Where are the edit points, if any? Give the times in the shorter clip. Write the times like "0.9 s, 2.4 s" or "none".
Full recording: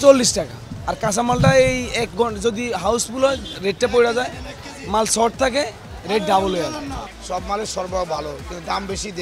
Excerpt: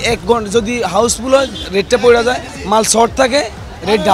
2.5 s